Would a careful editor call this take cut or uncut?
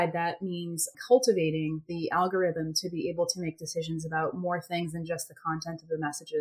cut